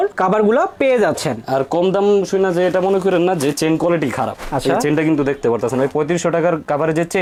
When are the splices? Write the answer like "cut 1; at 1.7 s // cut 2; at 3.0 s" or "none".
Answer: none